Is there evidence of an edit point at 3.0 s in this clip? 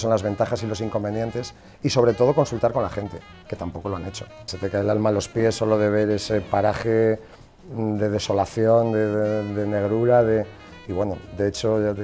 no; 1 cut; at 4.5 s

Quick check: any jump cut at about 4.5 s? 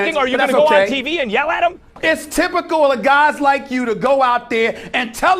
no; 1 cut; at 2.0 s

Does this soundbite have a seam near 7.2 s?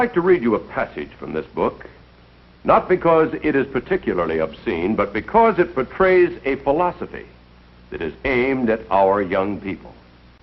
no; 0 cuts

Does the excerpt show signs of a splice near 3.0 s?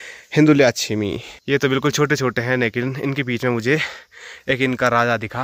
no; 1 cut; at 1.3 s

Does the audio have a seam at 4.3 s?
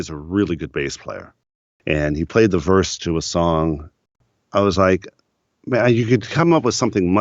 yes; 2 cuts; at 1.4 s, 4.3 s

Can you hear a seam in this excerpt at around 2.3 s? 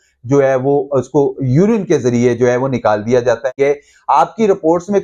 no; 1 cut; at 3.5 s

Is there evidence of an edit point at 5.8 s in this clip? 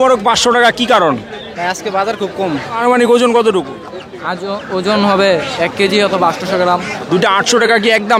no; 2 cuts; at 2.8 s, 7.1 s

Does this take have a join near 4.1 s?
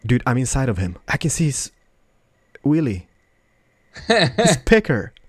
no; 1 cut; at 1.1 s

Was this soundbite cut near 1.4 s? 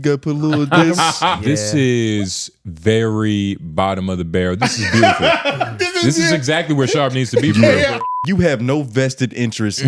yes; 2 cuts; at 1.4 s, 8.1 s

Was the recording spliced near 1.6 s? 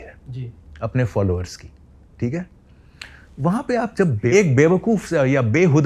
no; 1 cut; at 4.3 s

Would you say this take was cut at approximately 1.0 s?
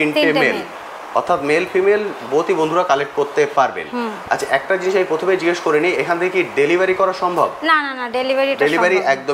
no; 0 cuts

